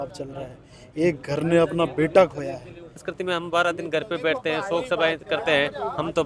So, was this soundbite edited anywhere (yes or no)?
yes